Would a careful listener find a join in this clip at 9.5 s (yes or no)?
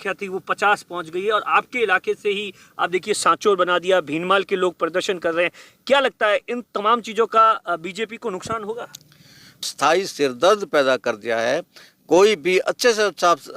yes